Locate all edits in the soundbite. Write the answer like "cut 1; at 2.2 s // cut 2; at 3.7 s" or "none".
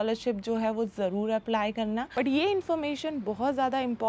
cut 1; at 2.1 s